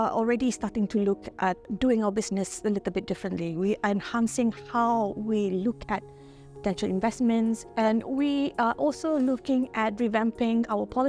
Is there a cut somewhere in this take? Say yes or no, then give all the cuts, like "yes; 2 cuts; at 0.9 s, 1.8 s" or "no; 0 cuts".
yes; 2 cuts; at 1.6 s, 7.7 s